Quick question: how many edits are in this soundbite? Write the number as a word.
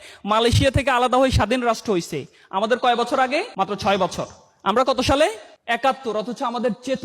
two